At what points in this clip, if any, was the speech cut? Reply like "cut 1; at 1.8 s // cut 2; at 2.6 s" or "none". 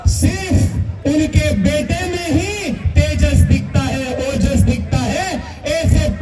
none